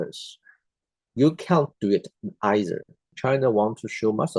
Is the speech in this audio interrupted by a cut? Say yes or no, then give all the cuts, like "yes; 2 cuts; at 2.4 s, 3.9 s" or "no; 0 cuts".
yes; 1 cut; at 3.1 s